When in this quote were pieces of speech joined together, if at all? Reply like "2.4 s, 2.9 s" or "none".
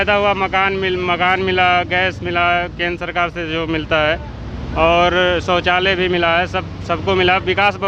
none